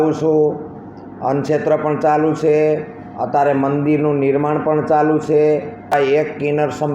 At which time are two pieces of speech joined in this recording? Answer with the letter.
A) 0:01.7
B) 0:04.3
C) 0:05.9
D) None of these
C